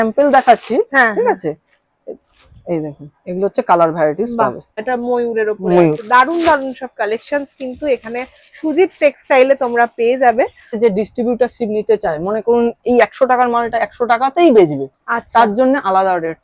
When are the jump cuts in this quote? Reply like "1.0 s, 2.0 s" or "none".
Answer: 4.8 s, 10.8 s